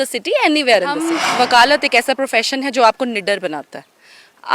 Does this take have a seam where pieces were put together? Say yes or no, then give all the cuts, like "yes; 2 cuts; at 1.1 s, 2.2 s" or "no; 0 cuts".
yes; 1 cut; at 1.2 s